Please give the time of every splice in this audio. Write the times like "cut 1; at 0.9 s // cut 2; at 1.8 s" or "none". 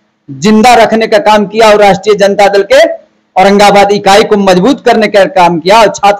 none

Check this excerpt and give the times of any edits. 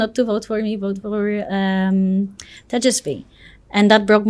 none

